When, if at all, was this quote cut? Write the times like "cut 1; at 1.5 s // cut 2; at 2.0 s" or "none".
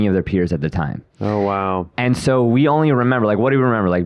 none